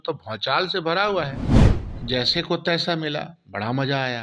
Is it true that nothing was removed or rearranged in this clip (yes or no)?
no